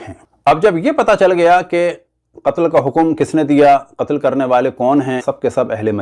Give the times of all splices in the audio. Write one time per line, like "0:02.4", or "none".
none